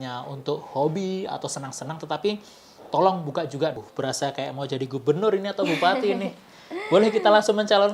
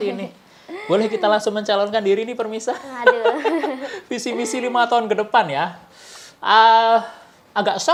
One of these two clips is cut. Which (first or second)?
first